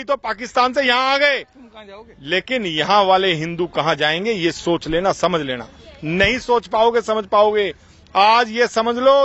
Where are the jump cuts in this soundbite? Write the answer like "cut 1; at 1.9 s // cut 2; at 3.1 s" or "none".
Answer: none